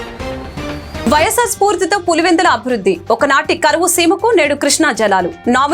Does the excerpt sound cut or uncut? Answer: cut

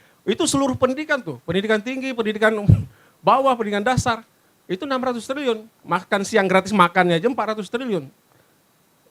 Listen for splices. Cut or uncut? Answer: uncut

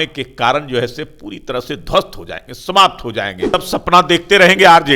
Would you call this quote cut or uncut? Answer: cut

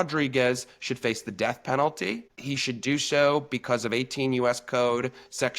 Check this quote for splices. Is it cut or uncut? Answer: cut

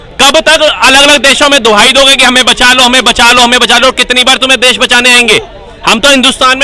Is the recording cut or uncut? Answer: uncut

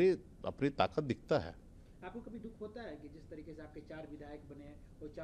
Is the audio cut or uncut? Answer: uncut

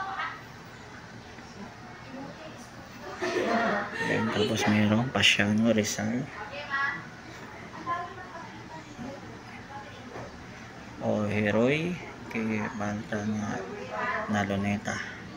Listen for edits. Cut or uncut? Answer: uncut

